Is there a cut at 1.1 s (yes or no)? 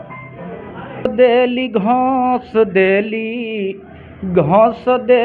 yes